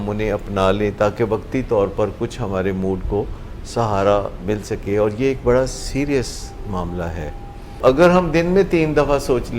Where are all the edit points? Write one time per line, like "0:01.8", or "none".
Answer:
0:07.8